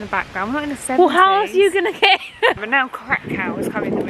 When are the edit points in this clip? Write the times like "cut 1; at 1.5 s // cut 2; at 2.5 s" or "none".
cut 1; at 2.6 s

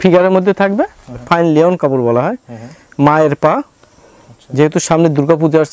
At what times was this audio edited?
cut 1; at 1.2 s

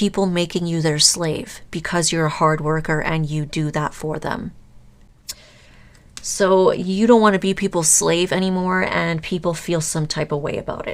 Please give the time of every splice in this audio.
cut 1; at 5.5 s

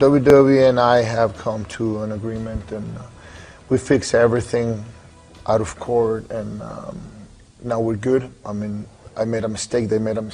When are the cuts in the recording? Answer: none

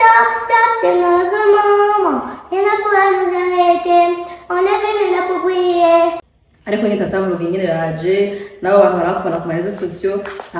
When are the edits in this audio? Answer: cut 1; at 6.3 s

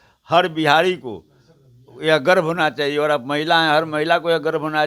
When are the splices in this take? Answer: none

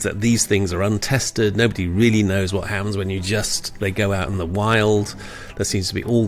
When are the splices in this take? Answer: none

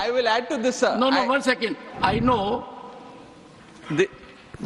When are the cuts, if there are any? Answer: cut 1; at 1.8 s

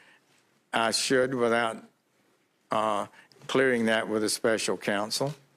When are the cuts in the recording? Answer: cut 1; at 3.6 s

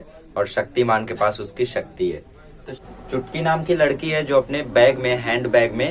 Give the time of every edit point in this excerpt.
cut 1; at 2.9 s

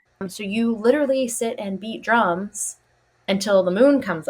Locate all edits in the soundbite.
none

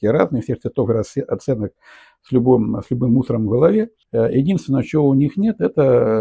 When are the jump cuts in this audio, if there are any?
cut 1; at 4.0 s

